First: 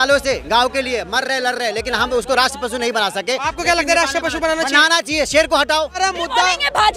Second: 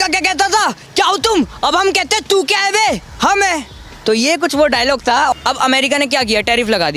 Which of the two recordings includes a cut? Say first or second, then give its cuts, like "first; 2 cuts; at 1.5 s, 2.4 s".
first; 1 cut; at 6.0 s